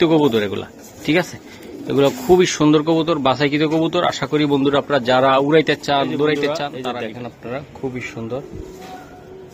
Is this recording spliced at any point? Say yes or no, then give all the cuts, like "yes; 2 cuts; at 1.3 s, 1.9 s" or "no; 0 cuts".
yes; 1 cut; at 6.7 s